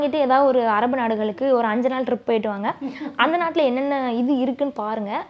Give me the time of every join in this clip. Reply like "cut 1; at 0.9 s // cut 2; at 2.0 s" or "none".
none